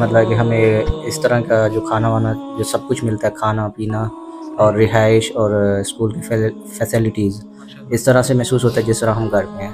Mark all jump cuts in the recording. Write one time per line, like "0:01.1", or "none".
none